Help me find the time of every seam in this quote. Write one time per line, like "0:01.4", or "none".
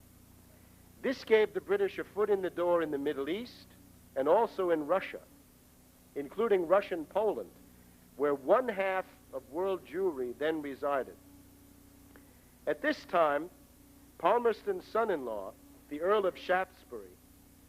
0:08.4